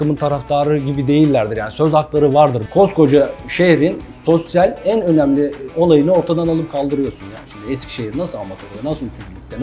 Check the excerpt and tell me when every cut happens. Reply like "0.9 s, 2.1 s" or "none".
2.6 s

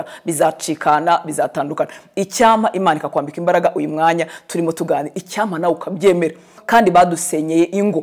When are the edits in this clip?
6.6 s

